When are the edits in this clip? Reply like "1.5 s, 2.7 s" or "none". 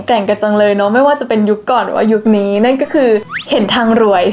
3.3 s

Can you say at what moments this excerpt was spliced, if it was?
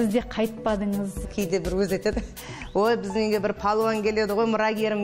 1.3 s

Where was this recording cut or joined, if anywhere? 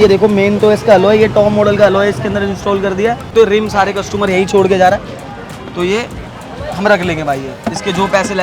3.3 s

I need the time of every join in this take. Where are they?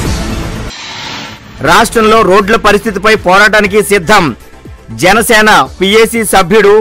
1.2 s

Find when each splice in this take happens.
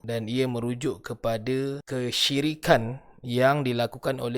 1.8 s

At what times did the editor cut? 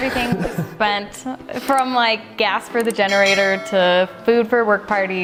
none

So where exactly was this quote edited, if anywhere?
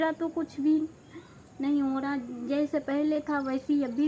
none

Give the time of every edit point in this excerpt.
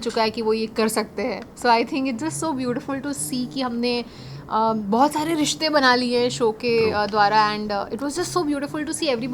none

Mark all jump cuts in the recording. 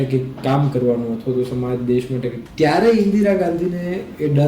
2.4 s

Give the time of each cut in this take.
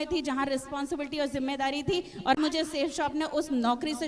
2.4 s

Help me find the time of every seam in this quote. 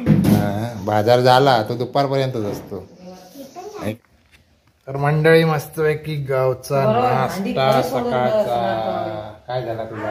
3.9 s

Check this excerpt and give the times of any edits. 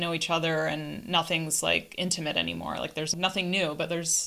3.1 s

